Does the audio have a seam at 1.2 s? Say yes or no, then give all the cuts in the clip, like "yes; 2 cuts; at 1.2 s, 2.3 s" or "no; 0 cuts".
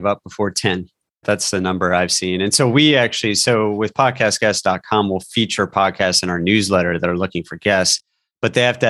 yes; 1 cut; at 1.2 s